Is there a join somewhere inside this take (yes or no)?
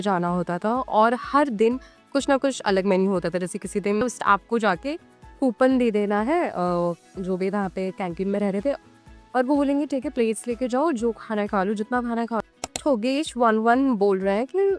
yes